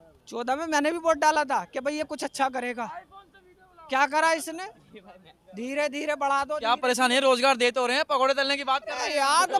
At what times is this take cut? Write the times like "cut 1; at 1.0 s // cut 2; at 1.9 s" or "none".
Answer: none